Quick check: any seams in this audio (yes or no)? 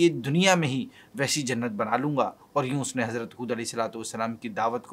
yes